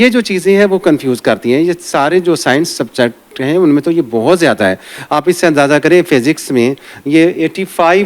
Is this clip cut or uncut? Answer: uncut